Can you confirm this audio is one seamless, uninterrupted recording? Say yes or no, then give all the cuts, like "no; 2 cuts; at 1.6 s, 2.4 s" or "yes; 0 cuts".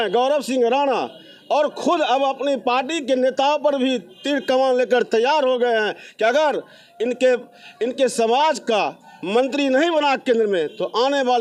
yes; 0 cuts